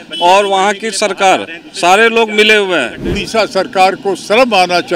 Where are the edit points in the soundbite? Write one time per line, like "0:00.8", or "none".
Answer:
0:03.1